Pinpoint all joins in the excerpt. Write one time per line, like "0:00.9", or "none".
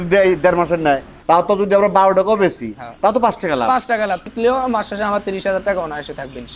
0:01.1
0:04.3